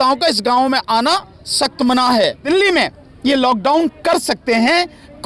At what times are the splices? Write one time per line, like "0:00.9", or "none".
0:02.4